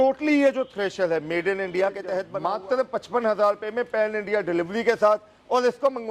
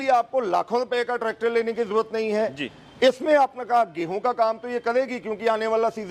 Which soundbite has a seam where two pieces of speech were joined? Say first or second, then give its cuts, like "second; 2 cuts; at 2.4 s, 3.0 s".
first; 1 cut; at 2.3 s